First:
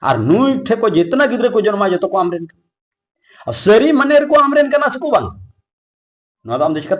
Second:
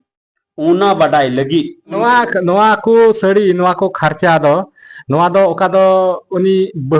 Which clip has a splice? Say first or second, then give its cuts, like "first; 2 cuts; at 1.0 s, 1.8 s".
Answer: second; 1 cut; at 2.0 s